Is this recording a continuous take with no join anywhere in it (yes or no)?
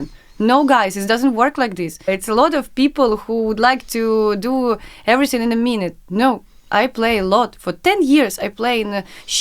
no